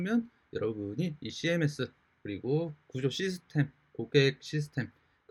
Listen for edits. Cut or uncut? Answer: uncut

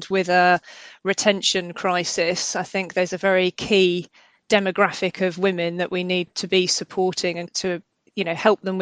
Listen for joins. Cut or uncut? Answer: cut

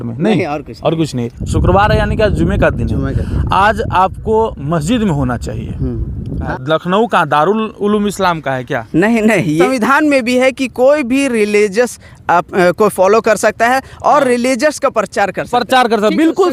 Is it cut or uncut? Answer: cut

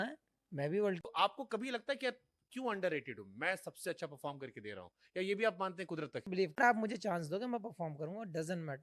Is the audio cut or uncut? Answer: cut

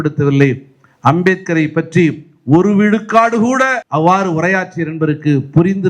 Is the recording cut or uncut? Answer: cut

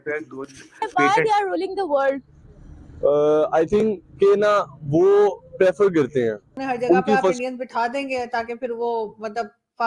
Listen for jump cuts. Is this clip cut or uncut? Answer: cut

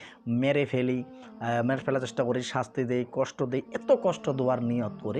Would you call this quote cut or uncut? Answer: uncut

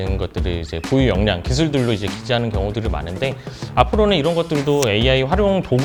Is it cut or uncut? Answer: uncut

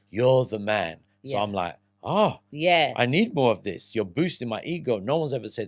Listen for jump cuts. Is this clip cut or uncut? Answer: uncut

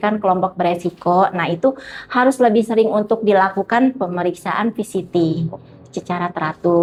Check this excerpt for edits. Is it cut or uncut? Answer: uncut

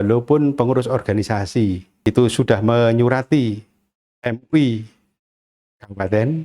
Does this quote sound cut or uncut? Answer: cut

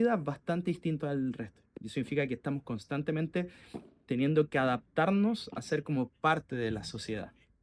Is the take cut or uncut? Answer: uncut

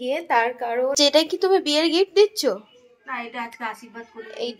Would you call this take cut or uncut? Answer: cut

